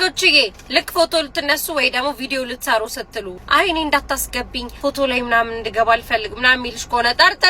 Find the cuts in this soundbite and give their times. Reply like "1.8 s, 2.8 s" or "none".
3.3 s, 4.6 s